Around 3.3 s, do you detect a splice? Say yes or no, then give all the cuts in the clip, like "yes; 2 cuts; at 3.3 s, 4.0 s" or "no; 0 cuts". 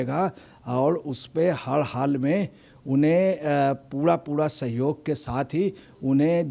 no; 0 cuts